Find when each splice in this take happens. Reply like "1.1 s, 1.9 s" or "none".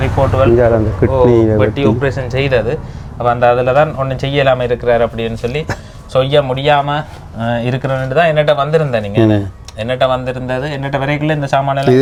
none